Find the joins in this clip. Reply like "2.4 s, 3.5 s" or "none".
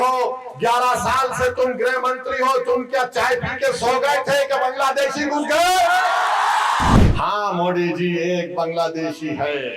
7.0 s